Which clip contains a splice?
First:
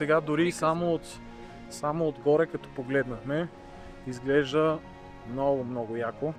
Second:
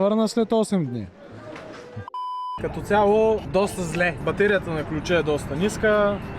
second; 2 cuts; at 2.6 s, 3.5 s

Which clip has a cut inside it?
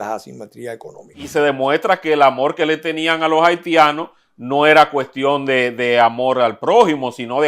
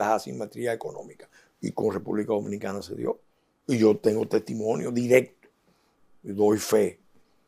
first; 1 cut; at 1.2 s

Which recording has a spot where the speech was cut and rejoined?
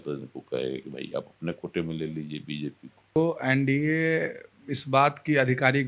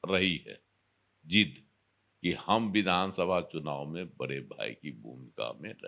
first; 1 cut; at 3.2 s

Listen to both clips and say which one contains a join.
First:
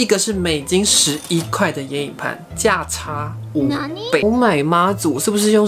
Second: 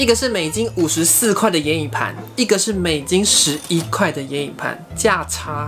first; 1 cut; at 4.2 s

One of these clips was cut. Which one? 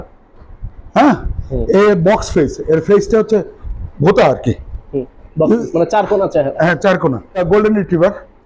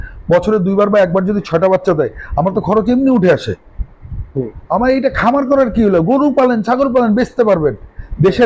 first; 1 cut; at 7.4 s

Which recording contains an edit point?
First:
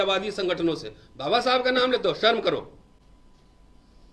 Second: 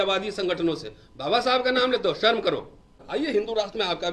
second; 1 cut; at 3.0 s

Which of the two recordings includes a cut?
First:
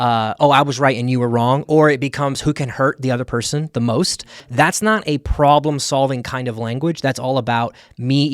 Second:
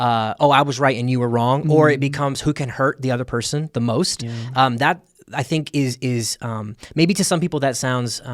first; 1 cut; at 4.5 s

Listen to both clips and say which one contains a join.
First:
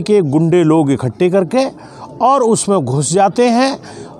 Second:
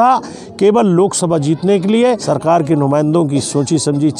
second; 1 cut; at 2.2 s

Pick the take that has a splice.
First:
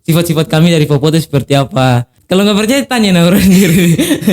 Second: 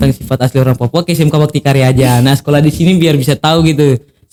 first; 1 cut; at 2.1 s

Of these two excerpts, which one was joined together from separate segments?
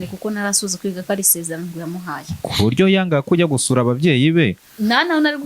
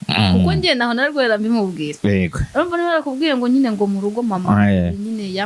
first; 1 cut; at 2.3 s

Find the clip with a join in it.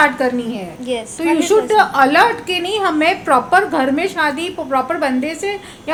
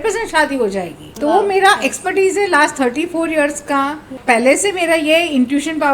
second; 2 cuts; at 1.0 s, 4.2 s

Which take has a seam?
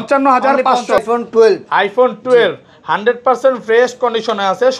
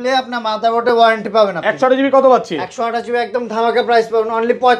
first; 1 cut; at 1.0 s

